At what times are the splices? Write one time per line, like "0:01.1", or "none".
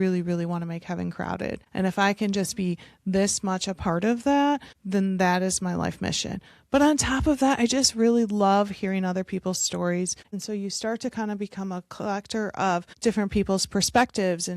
0:01.6
0:04.7
0:10.3
0:12.9